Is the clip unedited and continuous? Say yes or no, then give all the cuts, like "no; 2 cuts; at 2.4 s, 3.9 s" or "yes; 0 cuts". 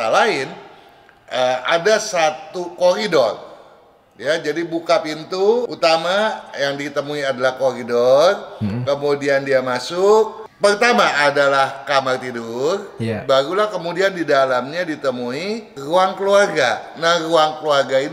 no; 3 cuts; at 5.7 s, 10.4 s, 15.7 s